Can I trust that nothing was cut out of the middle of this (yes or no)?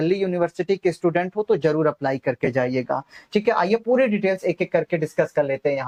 yes